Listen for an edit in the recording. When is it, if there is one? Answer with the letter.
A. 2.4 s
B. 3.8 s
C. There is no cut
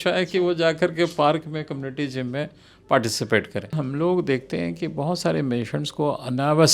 B